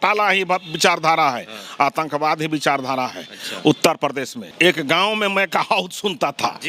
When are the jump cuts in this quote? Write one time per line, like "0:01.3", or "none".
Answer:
0:04.4

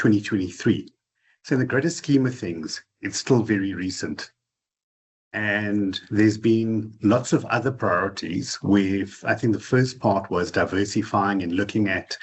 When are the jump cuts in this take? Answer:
none

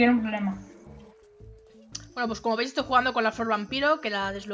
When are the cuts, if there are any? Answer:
0:02.1

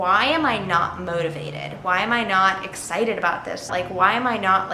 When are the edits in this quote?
0:03.7

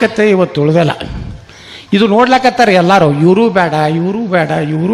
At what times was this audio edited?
none

